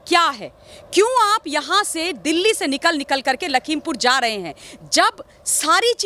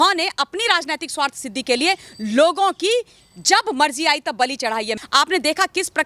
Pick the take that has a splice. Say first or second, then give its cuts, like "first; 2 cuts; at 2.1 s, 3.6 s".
second; 1 cut; at 4.9 s